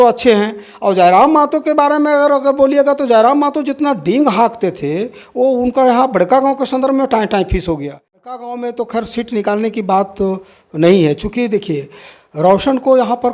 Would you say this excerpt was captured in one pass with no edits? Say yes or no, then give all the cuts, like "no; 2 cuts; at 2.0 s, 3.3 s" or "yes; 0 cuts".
no; 1 cut; at 8.4 s